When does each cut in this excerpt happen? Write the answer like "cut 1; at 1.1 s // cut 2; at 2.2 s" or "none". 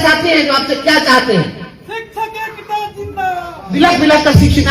cut 1; at 3.7 s